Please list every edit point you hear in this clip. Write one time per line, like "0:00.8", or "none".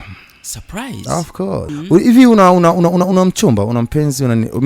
0:01.7